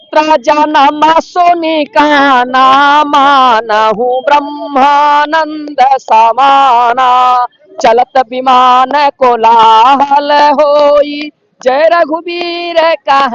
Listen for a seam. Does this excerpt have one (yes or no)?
no